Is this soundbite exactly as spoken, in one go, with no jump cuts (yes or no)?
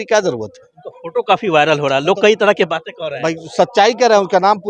yes